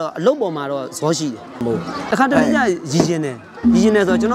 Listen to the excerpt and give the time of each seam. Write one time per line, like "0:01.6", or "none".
0:01.6